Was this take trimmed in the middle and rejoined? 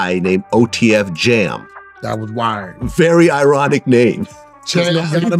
no; 0 cuts

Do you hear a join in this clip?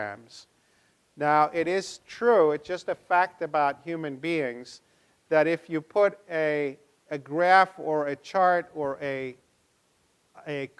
yes; 1 cut; at 9.6 s

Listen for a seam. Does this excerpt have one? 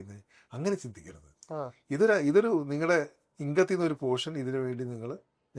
no; 0 cuts

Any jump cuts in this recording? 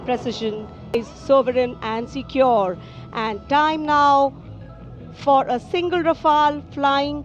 yes; 1 cut; at 0.9 s

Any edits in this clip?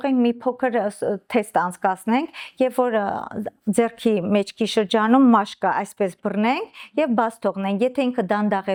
no; 0 cuts

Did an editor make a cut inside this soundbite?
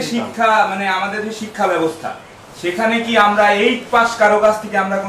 no; 0 cuts

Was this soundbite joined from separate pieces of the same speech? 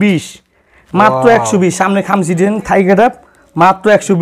no; 0 cuts

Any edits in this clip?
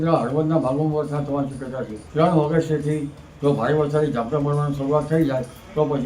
yes; 1 cut; at 2.0 s

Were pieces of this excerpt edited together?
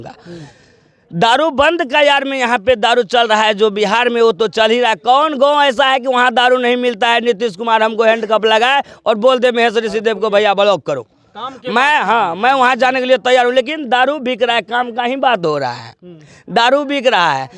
no; 0 cuts

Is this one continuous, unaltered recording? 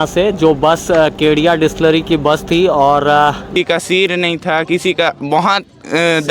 no; 1 cut; at 3.5 s

